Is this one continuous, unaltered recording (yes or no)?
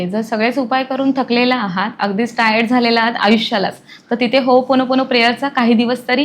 yes